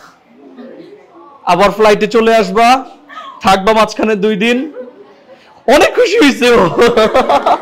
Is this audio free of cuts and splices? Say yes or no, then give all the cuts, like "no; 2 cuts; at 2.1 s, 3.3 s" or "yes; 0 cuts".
yes; 0 cuts